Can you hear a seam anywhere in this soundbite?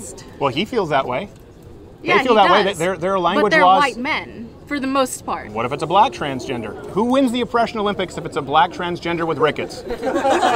yes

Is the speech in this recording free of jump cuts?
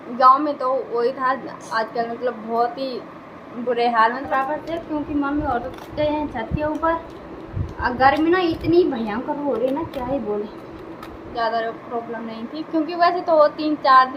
no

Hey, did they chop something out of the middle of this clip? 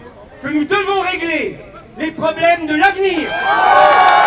yes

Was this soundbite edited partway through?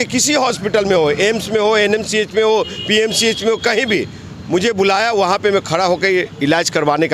no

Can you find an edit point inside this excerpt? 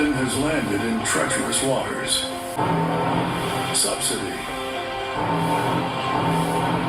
yes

